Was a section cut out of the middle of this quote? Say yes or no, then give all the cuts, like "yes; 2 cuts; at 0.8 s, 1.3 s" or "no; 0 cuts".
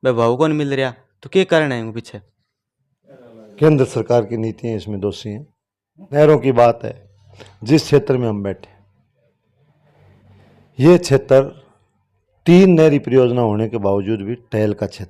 yes; 1 cut; at 6.2 s